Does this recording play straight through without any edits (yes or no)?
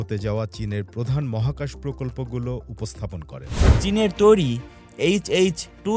no